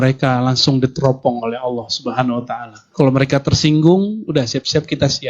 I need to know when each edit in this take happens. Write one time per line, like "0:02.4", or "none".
0:02.8